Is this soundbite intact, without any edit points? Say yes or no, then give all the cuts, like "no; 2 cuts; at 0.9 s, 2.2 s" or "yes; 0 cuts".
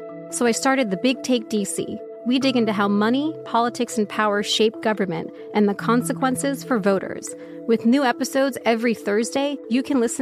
yes; 0 cuts